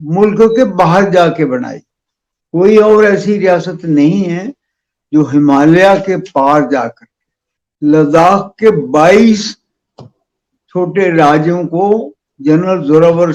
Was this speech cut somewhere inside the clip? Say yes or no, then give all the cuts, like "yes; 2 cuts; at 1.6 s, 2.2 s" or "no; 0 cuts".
no; 0 cuts